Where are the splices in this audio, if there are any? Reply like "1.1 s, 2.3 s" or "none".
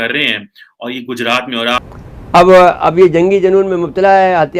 1.7 s